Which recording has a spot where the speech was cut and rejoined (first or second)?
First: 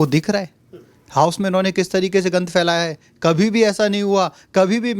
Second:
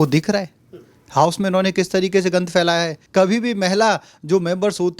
second